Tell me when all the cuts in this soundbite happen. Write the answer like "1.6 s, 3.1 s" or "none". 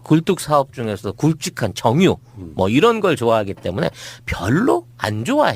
1.6 s